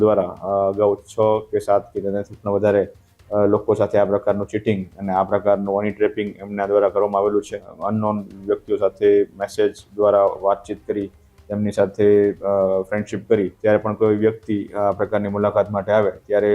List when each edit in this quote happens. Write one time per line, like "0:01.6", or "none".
0:07.7
0:13.5